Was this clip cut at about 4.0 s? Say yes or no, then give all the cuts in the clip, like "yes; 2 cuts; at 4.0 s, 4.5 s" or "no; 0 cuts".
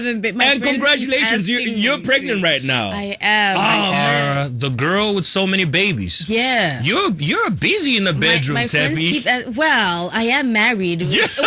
yes; 1 cut; at 4.0 s